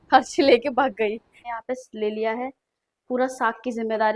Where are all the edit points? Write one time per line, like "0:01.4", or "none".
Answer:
0:01.4